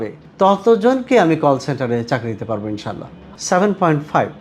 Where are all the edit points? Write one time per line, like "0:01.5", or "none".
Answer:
0:03.2

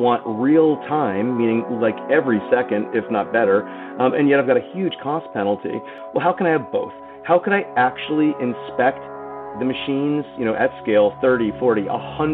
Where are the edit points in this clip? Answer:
0:06.0
0:09.5

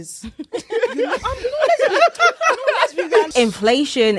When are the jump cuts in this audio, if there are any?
0:03.3

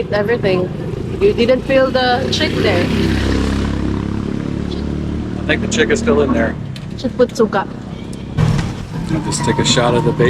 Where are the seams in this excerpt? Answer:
0:08.3

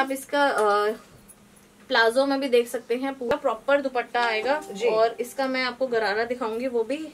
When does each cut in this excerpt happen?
0:03.3

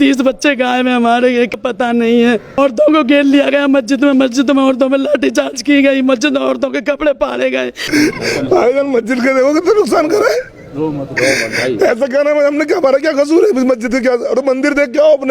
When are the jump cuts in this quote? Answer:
0:01.6
0:02.6
0:07.8

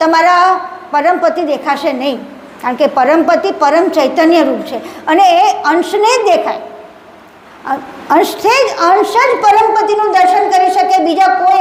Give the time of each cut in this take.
none

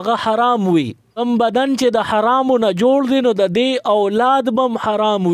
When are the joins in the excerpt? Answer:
0:01.2

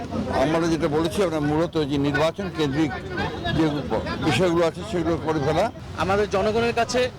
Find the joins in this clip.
0:05.9

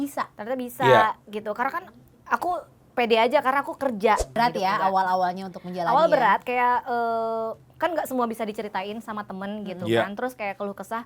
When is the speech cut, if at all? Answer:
0:04.3

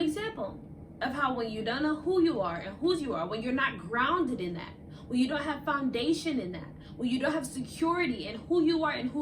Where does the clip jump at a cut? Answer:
none

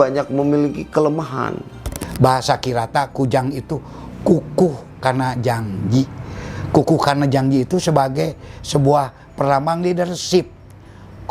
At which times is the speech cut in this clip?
0:02.0

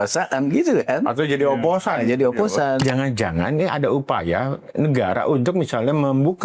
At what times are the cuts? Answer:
0:02.8

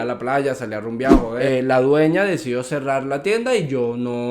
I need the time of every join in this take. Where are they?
0:01.3

